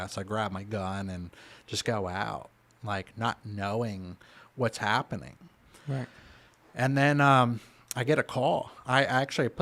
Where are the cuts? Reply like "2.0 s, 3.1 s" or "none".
none

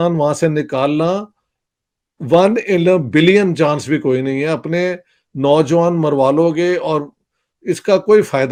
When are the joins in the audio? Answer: none

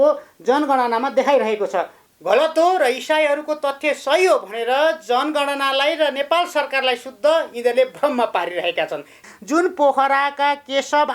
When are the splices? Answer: 1.9 s, 9.2 s

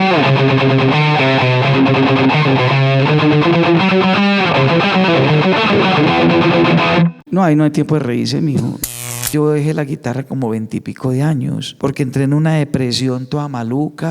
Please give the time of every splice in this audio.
7.2 s, 9.1 s, 11.7 s

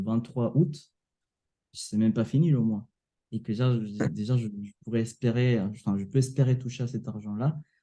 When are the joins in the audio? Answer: none

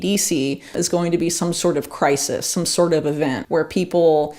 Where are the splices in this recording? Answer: 3.4 s

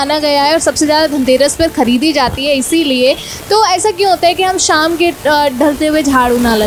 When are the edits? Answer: none

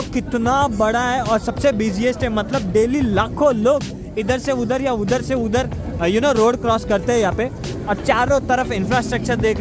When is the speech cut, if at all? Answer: none

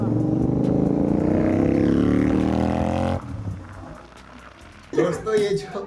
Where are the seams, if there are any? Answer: 4.9 s

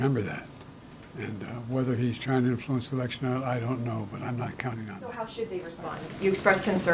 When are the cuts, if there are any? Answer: 5.0 s

